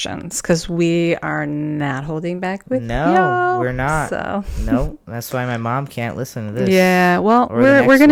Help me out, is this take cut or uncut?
uncut